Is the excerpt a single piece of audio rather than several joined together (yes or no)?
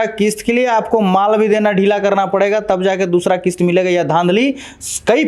yes